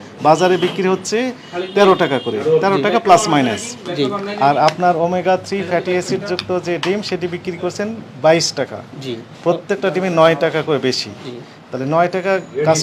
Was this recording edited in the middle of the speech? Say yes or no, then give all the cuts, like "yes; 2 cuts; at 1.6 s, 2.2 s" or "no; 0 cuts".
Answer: no; 0 cuts